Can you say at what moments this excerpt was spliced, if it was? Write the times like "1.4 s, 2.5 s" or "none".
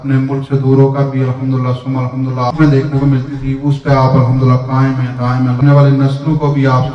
2.5 s, 5.6 s